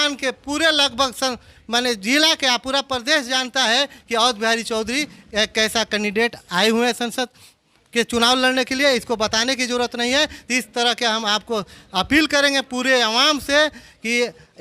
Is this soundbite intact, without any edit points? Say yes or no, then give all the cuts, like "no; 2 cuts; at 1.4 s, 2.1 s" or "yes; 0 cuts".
yes; 0 cuts